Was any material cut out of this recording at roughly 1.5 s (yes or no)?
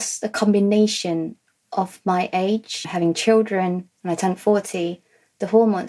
no